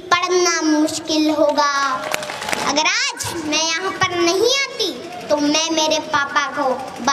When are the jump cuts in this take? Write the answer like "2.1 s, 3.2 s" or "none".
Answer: 2.6 s